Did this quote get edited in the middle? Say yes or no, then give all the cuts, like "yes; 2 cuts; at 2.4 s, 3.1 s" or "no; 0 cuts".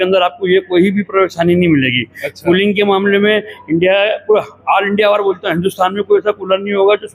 no; 0 cuts